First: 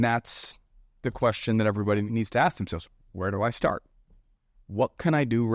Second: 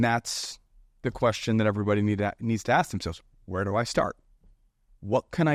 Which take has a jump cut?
first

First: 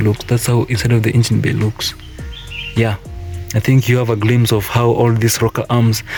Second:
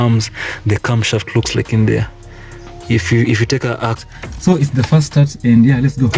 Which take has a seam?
second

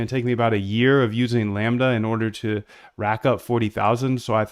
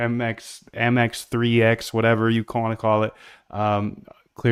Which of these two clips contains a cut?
first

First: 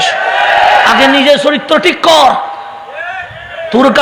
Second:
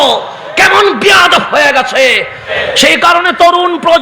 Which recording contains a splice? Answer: second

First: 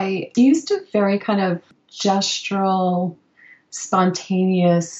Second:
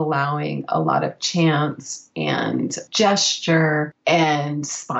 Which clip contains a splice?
second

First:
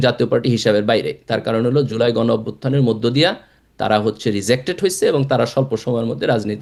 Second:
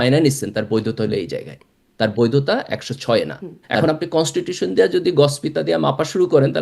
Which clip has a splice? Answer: second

